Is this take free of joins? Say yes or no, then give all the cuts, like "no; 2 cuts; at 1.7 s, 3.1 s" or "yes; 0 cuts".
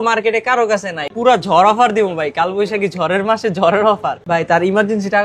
no; 2 cuts; at 1.1 s, 4.5 s